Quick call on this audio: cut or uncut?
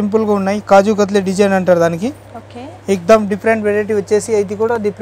uncut